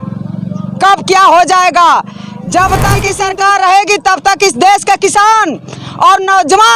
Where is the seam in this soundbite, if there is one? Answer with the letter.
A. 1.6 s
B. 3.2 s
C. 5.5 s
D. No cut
B